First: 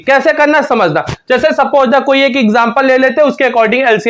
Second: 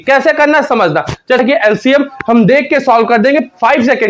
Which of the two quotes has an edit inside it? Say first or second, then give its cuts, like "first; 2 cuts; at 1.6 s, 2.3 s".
second; 1 cut; at 1.4 s